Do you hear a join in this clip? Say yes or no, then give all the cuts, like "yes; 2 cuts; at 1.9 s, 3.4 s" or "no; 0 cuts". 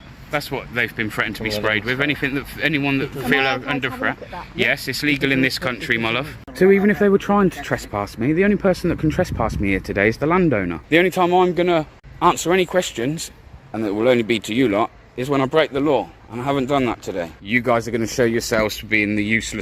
yes; 4 cuts; at 6.4 s, 10.8 s, 12.0 s, 17.4 s